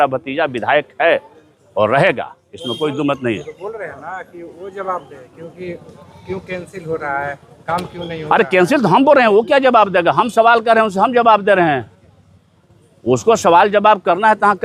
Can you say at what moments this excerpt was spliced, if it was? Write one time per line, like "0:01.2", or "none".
none

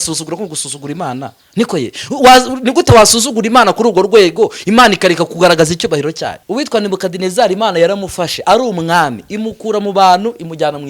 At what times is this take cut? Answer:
0:06.4

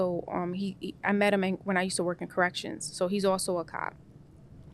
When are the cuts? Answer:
none

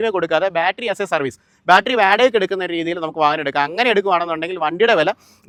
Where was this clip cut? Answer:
none

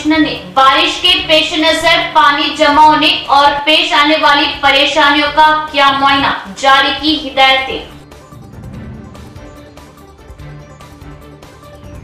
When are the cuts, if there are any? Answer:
none

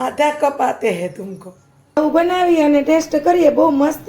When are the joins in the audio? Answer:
0:02.0

